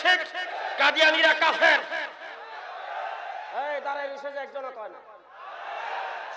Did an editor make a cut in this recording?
no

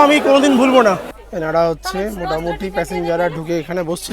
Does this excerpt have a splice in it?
yes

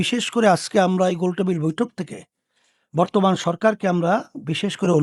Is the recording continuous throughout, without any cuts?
yes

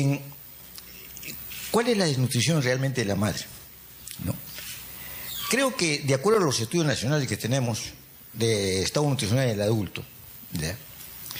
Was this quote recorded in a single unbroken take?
yes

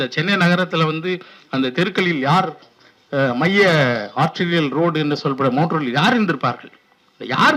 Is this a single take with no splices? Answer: yes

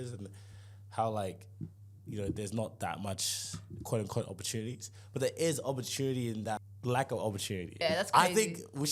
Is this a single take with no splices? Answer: no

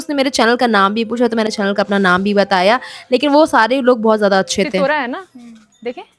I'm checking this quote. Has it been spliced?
no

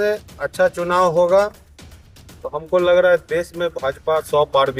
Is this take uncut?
yes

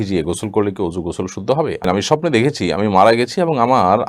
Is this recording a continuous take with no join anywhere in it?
no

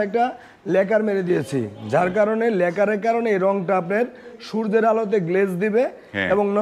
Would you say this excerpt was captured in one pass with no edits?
yes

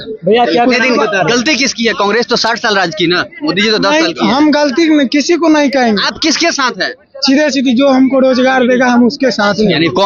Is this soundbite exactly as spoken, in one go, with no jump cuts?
yes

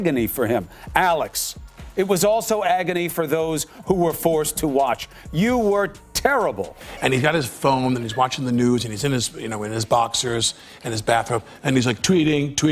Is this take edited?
no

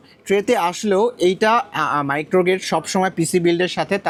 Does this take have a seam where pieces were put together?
no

